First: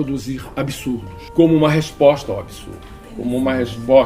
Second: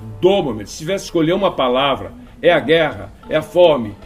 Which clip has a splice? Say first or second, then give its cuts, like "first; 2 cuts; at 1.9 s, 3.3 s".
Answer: first; 1 cut; at 1.2 s